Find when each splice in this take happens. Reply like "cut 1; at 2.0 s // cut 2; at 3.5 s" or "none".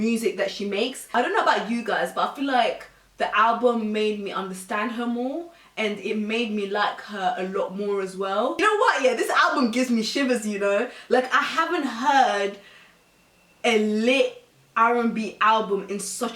cut 1; at 1.0 s // cut 2; at 8.5 s